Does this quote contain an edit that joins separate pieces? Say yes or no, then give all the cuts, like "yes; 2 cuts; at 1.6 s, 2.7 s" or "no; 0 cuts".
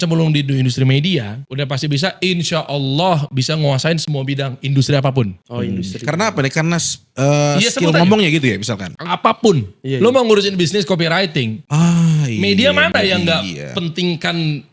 no; 0 cuts